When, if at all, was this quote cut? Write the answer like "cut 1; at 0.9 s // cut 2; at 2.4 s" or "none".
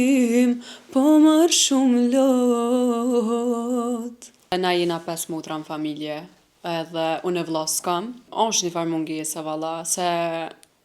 cut 1; at 4.5 s // cut 2; at 8.2 s